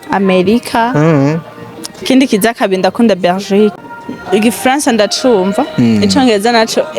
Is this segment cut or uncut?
cut